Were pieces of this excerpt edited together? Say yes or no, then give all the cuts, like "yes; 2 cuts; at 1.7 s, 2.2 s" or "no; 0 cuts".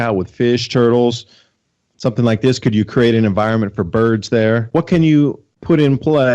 yes; 2 cuts; at 4.7 s, 5.5 s